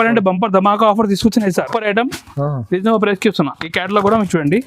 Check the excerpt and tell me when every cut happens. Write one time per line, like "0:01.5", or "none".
0:01.5